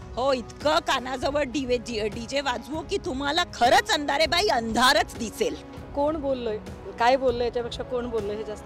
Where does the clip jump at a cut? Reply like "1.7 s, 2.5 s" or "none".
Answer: none